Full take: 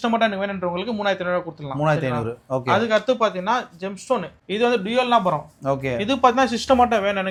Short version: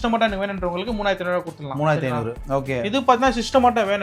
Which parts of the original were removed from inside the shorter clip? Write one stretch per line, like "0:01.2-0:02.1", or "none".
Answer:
0:02.4-0:05.5